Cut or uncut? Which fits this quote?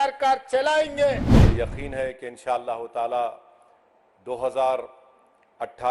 cut